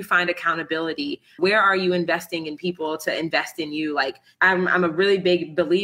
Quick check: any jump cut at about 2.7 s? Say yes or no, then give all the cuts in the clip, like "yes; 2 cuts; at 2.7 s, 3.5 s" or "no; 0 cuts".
no; 2 cuts; at 1.3 s, 4.2 s